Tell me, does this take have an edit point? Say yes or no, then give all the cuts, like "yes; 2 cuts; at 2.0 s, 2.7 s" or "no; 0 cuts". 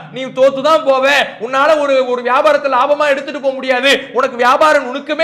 no; 0 cuts